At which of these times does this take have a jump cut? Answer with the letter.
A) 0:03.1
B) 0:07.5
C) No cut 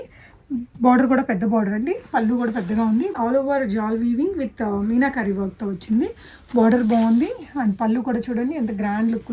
A